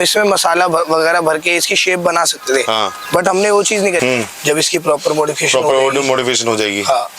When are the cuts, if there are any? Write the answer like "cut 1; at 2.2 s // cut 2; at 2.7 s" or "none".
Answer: cut 1; at 4.0 s